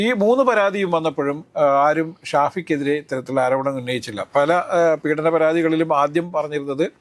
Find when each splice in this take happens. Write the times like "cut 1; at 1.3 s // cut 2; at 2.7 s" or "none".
none